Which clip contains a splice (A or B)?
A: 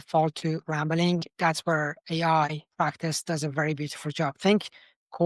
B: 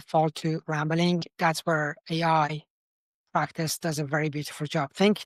A